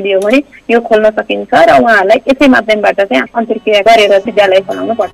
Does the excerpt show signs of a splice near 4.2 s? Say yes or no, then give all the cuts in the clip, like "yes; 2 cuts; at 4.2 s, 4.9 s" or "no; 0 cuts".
yes; 1 cut; at 4.2 s